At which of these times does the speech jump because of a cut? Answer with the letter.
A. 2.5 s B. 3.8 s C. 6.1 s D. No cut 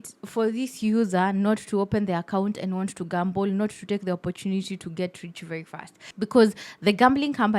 C